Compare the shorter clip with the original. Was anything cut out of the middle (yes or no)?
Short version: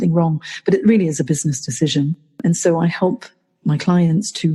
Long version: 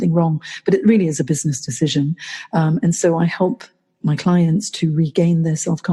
yes